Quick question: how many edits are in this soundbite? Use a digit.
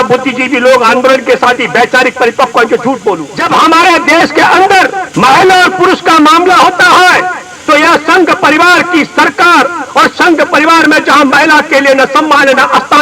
2